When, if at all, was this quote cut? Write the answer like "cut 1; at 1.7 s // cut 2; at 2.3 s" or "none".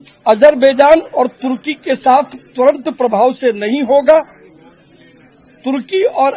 none